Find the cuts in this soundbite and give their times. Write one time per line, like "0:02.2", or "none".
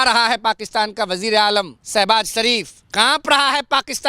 0:01.8
0:02.8